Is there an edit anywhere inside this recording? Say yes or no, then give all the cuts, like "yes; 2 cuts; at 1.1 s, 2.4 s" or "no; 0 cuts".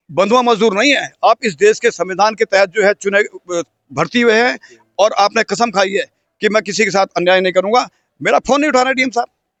no; 0 cuts